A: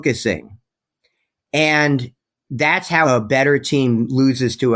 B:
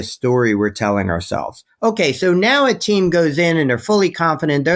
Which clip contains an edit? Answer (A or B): A